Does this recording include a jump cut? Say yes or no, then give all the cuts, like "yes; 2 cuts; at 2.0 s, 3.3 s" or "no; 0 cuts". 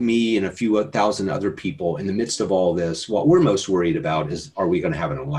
no; 0 cuts